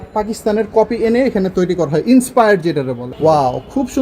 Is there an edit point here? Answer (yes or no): yes